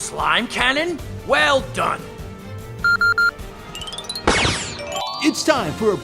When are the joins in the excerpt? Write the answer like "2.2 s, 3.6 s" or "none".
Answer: 5.0 s